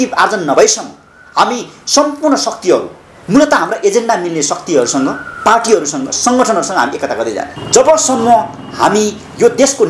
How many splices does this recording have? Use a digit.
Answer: 1